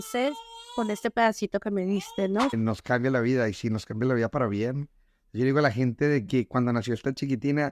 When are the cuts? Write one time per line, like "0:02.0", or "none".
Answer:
0:02.5